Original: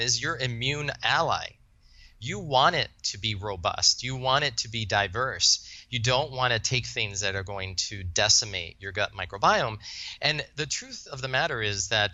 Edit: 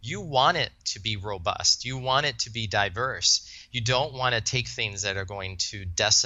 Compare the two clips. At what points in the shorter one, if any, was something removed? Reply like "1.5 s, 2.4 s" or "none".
none